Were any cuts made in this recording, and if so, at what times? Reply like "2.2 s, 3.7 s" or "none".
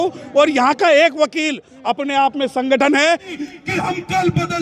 3.3 s